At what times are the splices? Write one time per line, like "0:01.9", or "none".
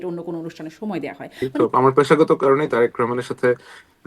0:01.5